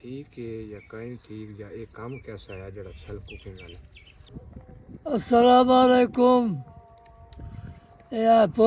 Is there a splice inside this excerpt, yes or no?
yes